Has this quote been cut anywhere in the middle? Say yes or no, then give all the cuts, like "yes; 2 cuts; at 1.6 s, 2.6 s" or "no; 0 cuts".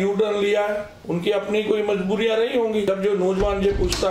yes; 2 cuts; at 0.9 s, 2.9 s